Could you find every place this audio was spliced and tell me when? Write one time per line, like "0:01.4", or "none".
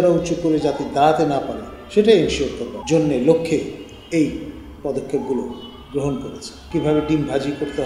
0:02.7
0:06.5